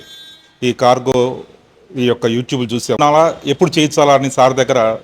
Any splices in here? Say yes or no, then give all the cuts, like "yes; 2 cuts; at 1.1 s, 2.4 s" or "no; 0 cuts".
yes; 1 cut; at 3.0 s